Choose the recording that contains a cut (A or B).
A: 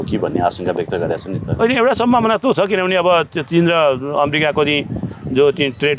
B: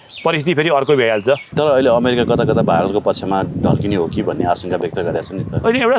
B